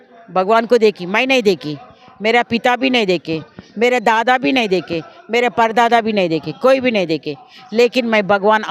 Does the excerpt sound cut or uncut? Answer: uncut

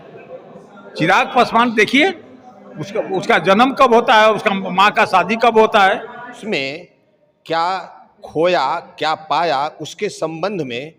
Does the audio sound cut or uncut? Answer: cut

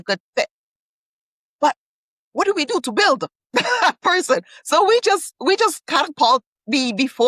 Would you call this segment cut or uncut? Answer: uncut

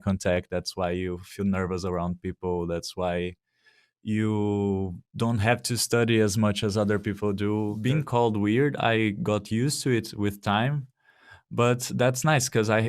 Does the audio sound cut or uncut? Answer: cut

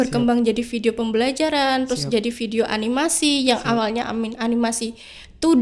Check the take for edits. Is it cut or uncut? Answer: uncut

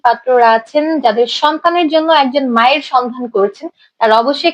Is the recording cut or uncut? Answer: uncut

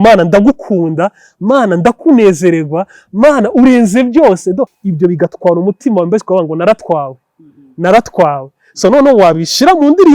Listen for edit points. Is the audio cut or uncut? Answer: cut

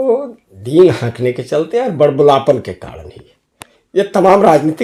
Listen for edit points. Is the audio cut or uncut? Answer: uncut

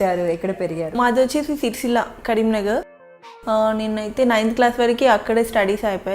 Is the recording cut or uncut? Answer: cut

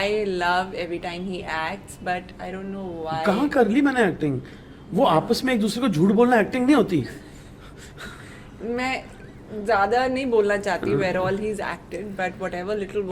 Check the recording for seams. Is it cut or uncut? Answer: uncut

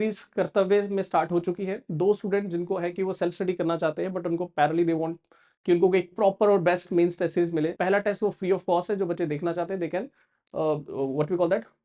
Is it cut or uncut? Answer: cut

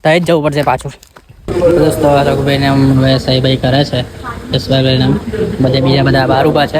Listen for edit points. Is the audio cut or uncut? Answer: cut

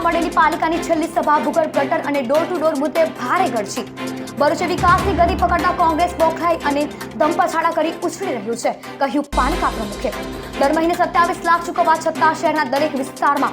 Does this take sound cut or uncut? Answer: uncut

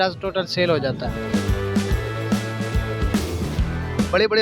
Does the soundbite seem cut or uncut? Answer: uncut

